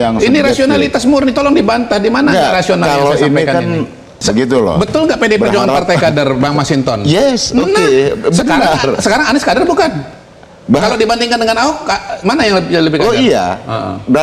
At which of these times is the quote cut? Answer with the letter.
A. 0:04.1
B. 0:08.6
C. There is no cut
A